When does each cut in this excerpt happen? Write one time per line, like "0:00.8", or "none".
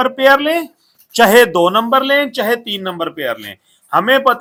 none